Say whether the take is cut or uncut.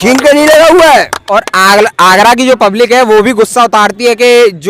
uncut